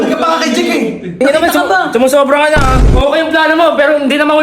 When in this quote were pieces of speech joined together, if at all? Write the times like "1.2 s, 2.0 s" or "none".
1.1 s, 2.9 s